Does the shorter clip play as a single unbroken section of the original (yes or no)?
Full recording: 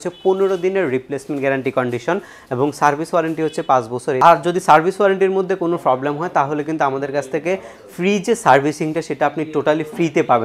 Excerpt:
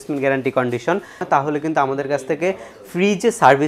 no